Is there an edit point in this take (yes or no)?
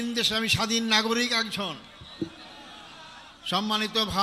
no